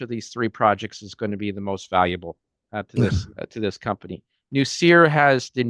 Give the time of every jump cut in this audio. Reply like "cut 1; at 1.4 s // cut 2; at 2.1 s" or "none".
none